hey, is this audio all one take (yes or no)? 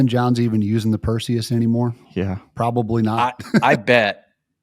no